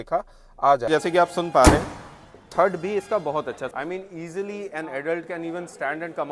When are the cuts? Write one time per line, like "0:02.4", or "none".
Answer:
0:00.9
0:03.7